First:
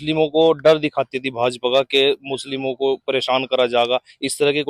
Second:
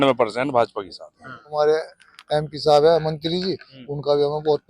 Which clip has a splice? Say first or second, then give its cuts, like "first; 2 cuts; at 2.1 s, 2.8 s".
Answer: second; 1 cut; at 1.5 s